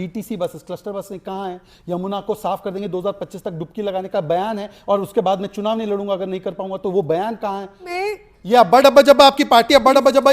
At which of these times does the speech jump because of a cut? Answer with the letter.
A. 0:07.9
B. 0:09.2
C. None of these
A